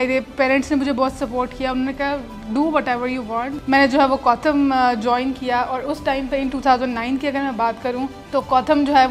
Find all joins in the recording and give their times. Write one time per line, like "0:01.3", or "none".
0:03.5
0:08.2